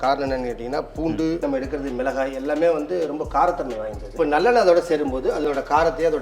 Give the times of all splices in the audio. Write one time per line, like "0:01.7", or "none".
0:01.4
0:04.1